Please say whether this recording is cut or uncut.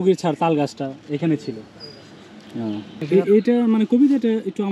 cut